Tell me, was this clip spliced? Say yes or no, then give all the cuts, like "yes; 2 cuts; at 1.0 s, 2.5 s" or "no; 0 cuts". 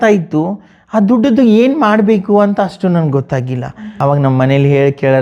yes; 1 cut; at 3.8 s